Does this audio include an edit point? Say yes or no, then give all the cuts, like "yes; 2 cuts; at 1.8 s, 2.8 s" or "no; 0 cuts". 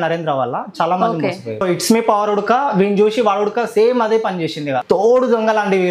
yes; 2 cuts; at 1.6 s, 4.8 s